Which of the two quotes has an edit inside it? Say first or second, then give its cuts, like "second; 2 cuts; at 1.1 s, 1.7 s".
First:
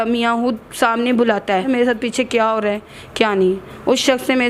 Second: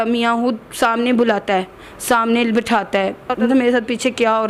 first; 1 cut; at 1.7 s